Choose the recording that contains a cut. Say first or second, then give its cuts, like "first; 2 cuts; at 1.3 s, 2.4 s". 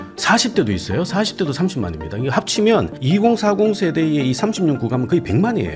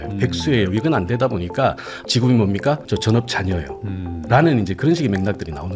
second; 1 cut; at 2.0 s